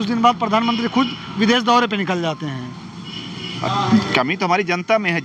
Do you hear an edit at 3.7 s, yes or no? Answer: yes